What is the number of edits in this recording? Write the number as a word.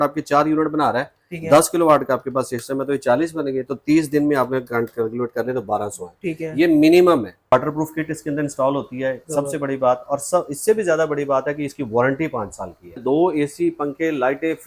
two